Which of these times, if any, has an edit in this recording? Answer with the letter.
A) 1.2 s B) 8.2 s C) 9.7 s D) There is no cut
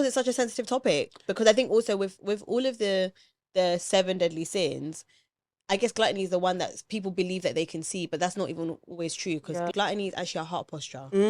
C